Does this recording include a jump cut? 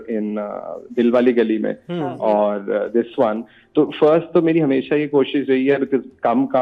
no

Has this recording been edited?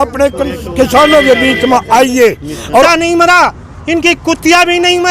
yes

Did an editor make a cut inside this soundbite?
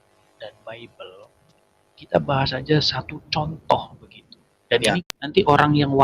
yes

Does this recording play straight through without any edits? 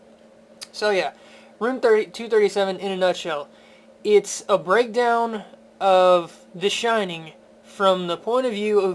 yes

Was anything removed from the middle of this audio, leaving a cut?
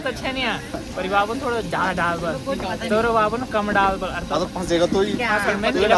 no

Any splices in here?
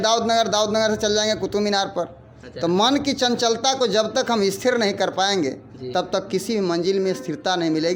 no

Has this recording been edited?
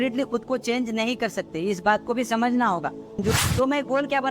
yes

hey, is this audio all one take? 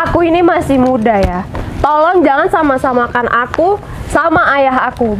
yes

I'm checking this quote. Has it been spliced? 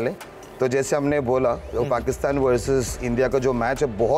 no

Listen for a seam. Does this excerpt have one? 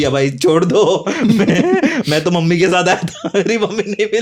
no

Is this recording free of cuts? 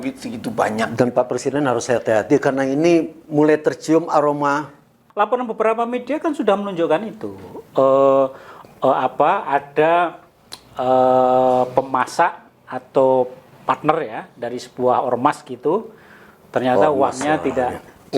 no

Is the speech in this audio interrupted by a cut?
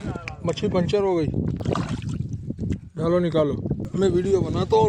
yes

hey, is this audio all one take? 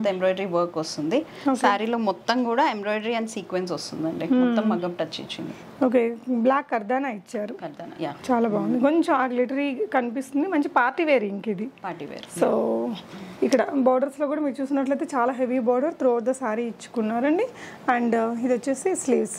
yes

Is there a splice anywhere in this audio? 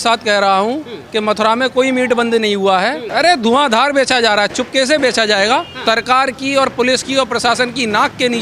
yes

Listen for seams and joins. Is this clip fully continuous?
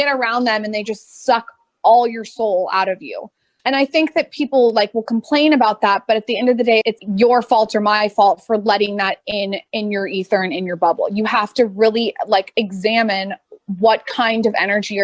yes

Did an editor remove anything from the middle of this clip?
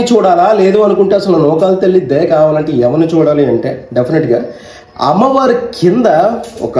no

